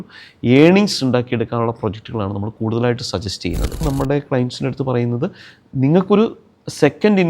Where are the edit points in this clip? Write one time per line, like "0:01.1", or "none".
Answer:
0:03.9

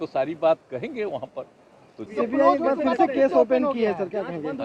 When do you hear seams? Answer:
0:02.0

